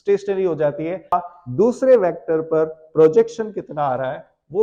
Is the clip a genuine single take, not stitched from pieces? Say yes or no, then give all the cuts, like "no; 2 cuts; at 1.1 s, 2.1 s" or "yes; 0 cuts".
no; 1 cut; at 1.1 s